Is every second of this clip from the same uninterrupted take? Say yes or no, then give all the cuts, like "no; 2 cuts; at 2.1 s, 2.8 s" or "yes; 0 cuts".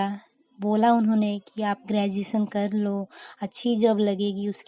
yes; 0 cuts